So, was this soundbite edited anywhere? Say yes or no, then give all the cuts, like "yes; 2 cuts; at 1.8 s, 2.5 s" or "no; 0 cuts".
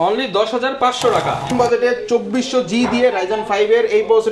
yes; 1 cut; at 1.5 s